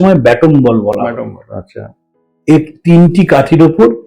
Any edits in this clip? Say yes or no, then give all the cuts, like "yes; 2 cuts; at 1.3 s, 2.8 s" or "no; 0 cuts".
no; 0 cuts